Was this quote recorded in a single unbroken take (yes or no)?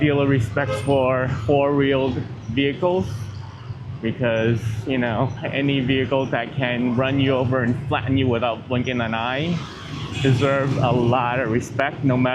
yes